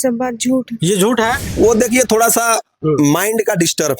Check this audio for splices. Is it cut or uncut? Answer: cut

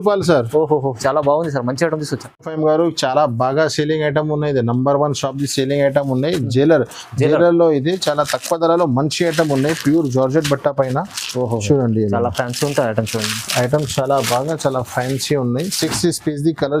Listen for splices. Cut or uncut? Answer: uncut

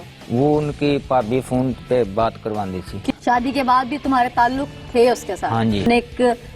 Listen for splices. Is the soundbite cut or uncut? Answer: cut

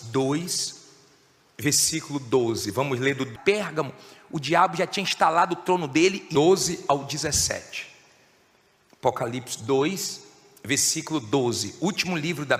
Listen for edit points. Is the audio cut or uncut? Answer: uncut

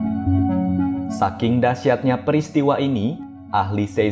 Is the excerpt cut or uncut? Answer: cut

